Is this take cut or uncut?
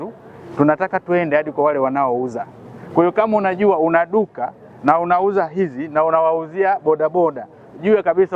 uncut